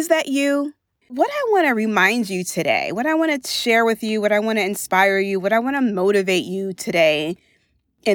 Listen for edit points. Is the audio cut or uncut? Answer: cut